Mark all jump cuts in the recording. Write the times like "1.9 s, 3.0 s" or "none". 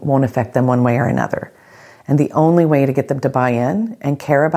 none